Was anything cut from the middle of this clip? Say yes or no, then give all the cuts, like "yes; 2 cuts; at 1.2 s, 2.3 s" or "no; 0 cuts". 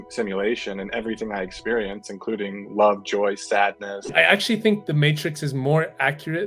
yes; 1 cut; at 4.1 s